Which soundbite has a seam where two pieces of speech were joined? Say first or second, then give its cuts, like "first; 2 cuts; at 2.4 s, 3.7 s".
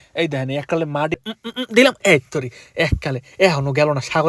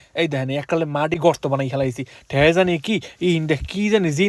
first; 1 cut; at 1.2 s